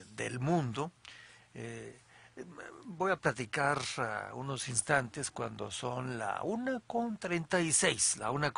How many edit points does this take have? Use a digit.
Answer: 1